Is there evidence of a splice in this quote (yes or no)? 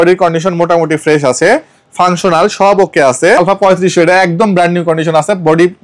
yes